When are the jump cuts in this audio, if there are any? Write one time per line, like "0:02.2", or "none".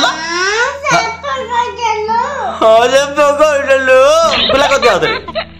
none